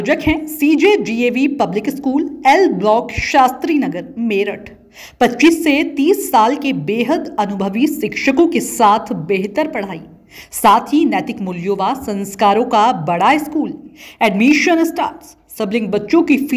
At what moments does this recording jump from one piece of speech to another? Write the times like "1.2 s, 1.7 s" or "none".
none